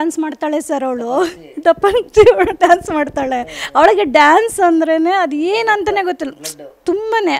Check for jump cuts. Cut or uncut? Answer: uncut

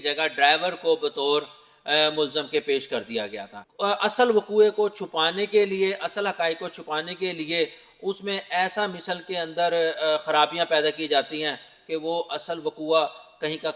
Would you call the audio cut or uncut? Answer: uncut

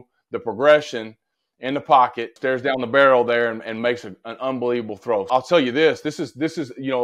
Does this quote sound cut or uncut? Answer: uncut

